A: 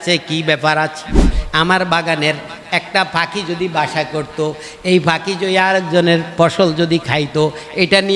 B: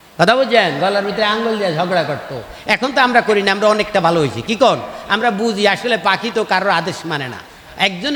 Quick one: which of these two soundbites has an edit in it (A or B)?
A